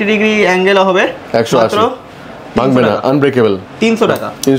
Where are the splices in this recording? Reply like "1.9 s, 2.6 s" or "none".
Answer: none

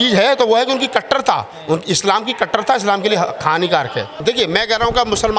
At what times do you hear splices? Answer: 4.1 s

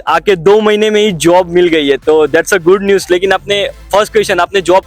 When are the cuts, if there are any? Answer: none

